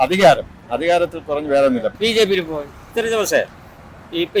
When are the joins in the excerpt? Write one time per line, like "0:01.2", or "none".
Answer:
0:01.9
0:02.9